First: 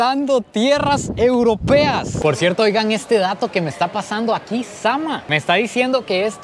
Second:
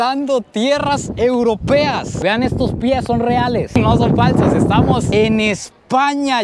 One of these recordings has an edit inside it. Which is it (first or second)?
first